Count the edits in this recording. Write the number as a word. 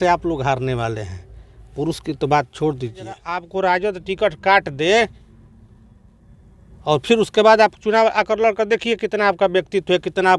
one